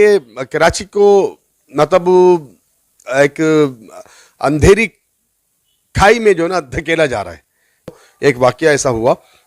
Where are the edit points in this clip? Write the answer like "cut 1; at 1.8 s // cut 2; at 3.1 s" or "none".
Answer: cut 1; at 7.9 s